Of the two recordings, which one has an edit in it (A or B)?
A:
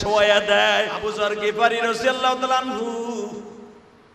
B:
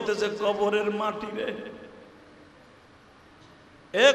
A